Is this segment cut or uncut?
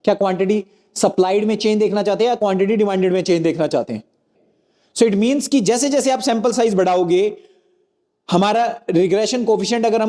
cut